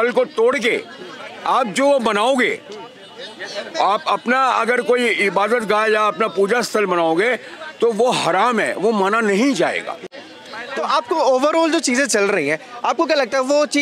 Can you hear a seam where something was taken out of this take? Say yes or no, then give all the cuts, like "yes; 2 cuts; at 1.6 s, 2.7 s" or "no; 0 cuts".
no; 0 cuts